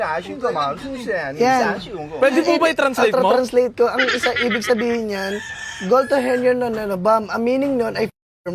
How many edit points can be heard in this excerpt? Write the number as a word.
zero